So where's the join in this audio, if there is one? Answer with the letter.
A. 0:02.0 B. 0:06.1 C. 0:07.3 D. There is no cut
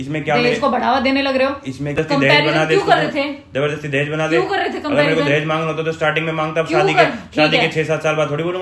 A